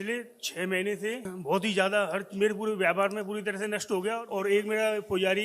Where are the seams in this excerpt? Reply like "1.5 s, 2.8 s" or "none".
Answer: 1.3 s, 4.2 s

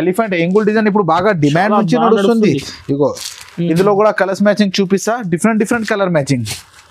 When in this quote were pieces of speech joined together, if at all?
none

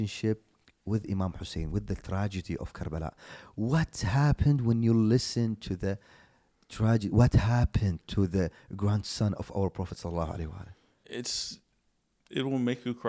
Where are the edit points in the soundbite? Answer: none

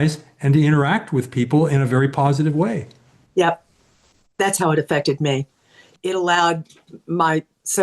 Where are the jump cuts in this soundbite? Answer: 5.9 s

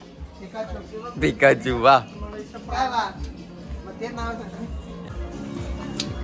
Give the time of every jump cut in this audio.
5.0 s

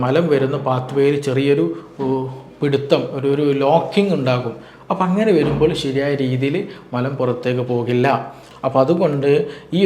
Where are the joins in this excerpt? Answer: 8.5 s

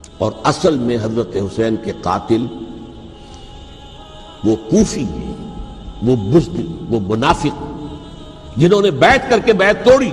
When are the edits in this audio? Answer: none

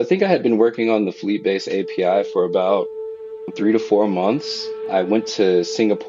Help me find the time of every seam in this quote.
none

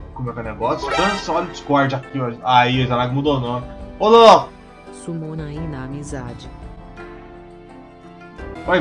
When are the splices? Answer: none

